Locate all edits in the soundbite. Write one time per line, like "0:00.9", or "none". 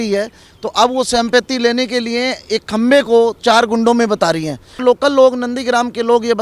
0:04.8